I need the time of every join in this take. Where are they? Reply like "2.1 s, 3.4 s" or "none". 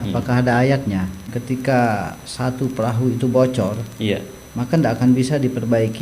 1.2 s